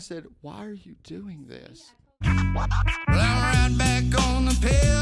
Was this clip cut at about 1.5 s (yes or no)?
yes